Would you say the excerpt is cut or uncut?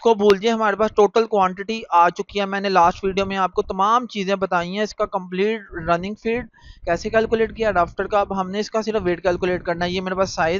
uncut